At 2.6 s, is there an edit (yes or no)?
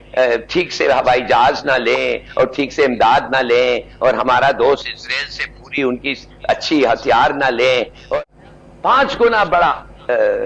no